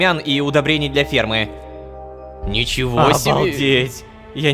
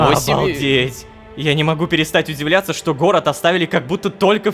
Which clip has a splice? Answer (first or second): first